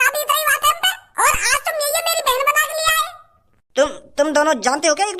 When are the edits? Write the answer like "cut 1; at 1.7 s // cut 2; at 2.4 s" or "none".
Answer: cut 1; at 1.0 s